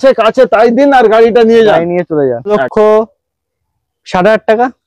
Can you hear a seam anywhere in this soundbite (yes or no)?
yes